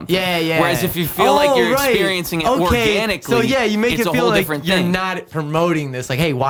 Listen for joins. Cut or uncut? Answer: uncut